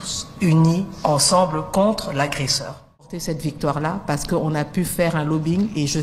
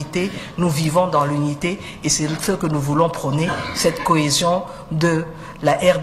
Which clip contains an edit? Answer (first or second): first